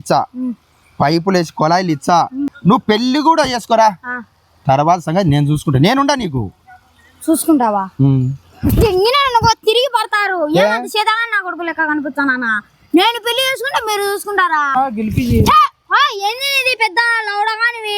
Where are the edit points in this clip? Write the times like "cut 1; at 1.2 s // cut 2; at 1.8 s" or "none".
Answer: cut 1; at 2.5 s // cut 2; at 14.8 s